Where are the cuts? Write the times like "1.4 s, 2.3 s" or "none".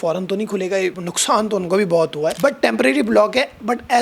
1.1 s, 2.3 s